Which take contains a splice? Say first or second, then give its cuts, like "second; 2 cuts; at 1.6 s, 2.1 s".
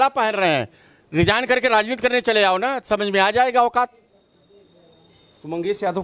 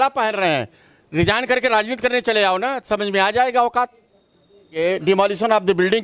second; 1 cut; at 4.8 s